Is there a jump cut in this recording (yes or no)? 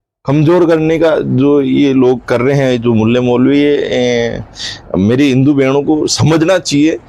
no